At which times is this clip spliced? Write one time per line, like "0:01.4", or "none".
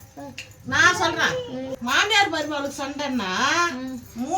0:01.7

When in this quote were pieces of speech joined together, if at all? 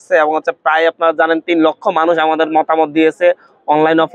none

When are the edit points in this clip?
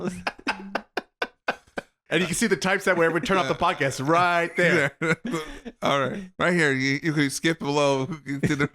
0:02.0
0:06.2

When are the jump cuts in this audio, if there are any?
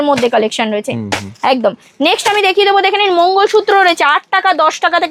none

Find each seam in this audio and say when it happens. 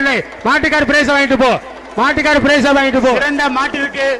0:03.2

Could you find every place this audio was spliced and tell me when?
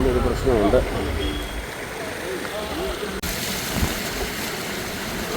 0:03.2

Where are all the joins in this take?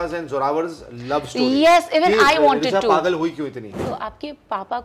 0:03.8

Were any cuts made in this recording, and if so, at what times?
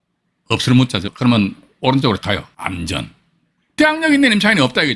0:01.1
0:02.2

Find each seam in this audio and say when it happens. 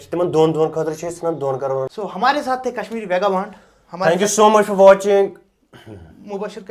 0:01.9

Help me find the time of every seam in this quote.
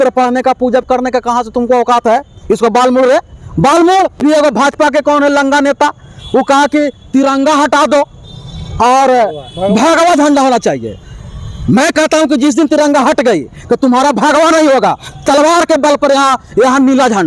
0:04.2

